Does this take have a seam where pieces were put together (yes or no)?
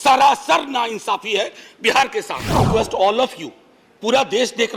yes